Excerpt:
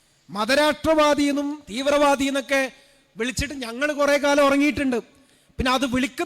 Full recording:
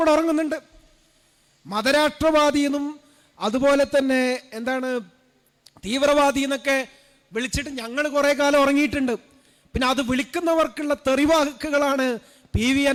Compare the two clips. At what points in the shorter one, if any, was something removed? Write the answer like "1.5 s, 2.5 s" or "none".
1.6 s